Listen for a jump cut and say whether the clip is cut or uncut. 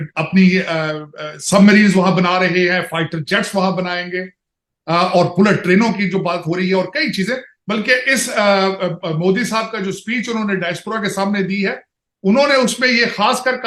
uncut